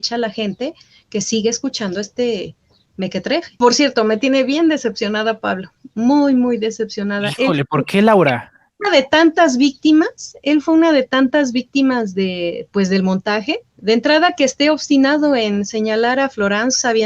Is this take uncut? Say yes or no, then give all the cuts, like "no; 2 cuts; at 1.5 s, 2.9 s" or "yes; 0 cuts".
no; 2 cuts; at 3.6 s, 13.7 s